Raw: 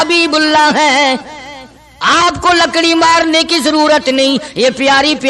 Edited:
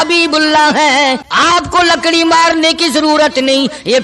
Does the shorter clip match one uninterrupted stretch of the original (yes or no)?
no